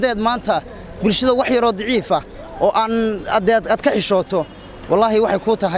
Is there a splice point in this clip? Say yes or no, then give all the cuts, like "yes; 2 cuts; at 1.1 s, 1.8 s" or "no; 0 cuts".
no; 0 cuts